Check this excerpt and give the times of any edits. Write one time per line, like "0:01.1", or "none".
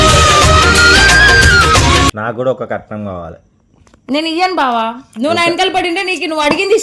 0:02.2